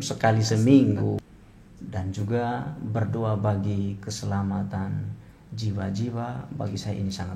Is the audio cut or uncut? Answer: cut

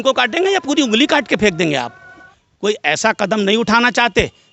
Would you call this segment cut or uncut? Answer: cut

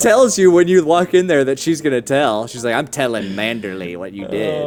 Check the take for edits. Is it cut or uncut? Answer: uncut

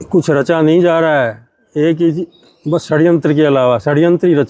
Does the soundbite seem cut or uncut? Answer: uncut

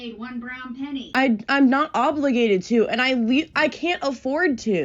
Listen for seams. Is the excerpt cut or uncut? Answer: cut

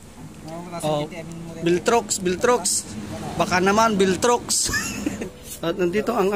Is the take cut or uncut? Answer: cut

